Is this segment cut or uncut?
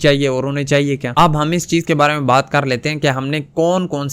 cut